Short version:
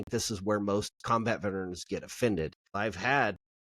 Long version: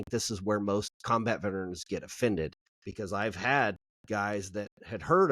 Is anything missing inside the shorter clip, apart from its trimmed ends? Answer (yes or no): yes